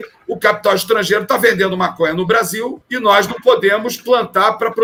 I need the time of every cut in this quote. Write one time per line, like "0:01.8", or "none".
none